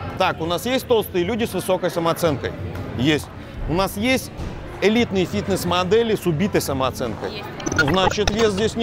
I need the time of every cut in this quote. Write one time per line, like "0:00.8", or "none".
none